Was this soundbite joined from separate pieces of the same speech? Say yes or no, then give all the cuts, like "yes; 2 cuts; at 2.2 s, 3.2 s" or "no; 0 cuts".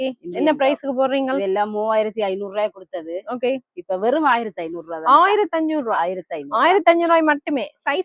no; 0 cuts